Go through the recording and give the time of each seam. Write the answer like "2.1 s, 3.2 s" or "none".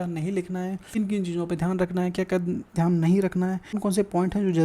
1.0 s, 3.7 s